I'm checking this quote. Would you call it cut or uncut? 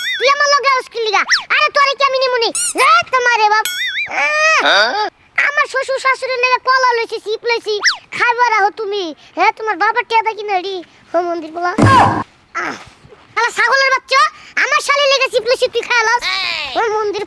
uncut